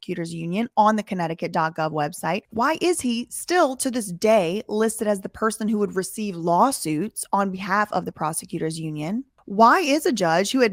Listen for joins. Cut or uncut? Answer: uncut